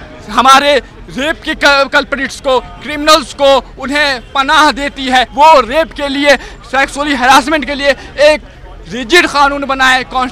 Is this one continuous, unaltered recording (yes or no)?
no